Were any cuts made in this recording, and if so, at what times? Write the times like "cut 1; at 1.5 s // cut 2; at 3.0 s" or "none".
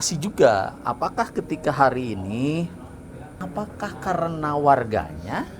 cut 1; at 3.3 s